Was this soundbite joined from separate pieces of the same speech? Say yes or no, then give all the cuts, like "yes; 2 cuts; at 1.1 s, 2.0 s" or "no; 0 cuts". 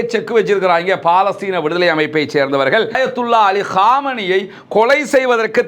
yes; 1 cut; at 3.0 s